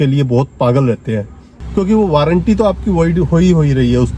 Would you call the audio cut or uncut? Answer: cut